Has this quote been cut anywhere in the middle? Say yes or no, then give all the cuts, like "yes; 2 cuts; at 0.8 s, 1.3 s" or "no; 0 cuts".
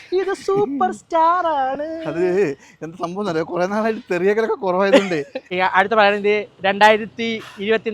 yes; 1 cut; at 5.4 s